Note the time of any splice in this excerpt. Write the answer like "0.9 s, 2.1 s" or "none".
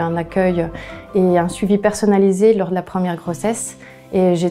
none